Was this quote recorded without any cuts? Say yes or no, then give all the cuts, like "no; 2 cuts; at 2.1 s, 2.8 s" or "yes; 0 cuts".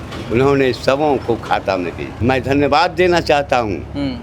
no; 1 cut; at 2.1 s